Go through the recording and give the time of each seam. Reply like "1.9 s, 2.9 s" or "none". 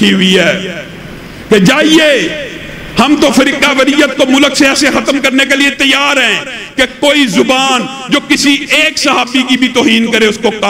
none